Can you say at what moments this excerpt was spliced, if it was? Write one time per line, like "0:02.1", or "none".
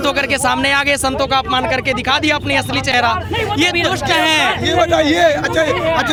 none